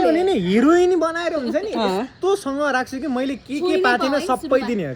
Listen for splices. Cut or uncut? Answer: uncut